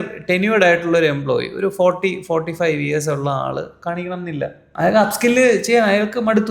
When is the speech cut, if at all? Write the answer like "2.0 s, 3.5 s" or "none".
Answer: 4.6 s